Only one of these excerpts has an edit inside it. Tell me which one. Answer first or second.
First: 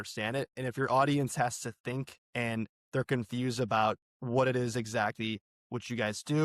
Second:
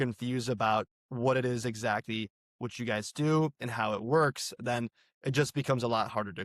first